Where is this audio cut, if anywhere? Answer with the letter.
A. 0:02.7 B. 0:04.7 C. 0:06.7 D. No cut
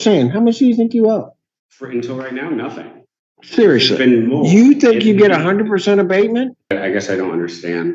C